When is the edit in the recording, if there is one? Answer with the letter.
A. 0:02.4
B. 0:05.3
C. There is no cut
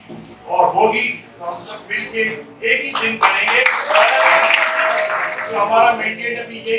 B